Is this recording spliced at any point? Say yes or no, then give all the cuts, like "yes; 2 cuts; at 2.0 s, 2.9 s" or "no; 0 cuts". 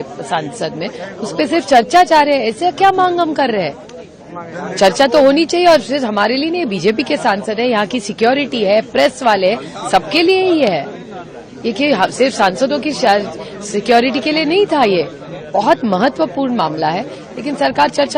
no; 0 cuts